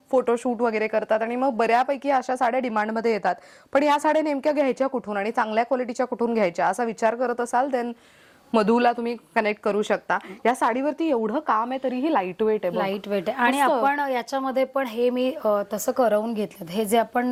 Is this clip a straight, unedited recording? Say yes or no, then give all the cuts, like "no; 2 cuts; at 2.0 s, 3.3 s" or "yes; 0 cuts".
yes; 0 cuts